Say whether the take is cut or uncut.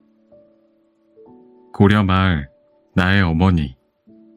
cut